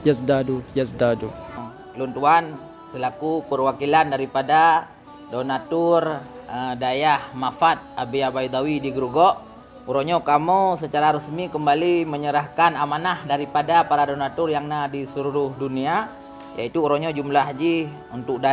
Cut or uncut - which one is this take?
cut